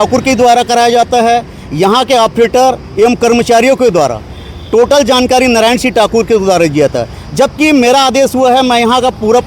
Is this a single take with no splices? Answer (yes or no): yes